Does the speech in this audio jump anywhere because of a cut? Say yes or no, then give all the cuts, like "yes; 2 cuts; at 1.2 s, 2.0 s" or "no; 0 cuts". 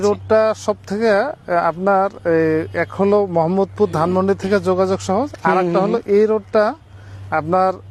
no; 0 cuts